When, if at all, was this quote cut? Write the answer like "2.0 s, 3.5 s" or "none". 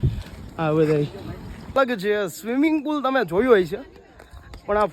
1.8 s